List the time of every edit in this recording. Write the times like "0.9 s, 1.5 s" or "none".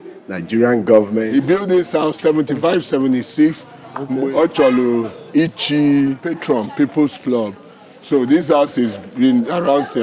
1.3 s, 4.2 s, 6.3 s